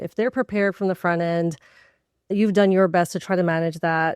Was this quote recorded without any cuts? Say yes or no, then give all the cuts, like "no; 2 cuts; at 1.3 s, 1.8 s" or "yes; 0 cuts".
no; 1 cut; at 2.3 s